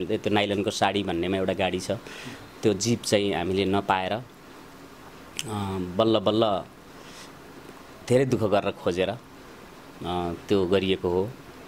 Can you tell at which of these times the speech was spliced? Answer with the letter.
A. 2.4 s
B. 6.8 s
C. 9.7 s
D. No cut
D